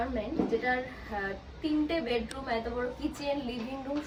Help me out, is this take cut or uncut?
uncut